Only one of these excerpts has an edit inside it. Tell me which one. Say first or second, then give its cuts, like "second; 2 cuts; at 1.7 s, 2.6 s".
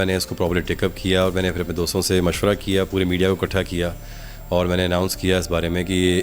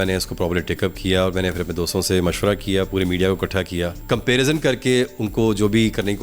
second; 1 cut; at 4.0 s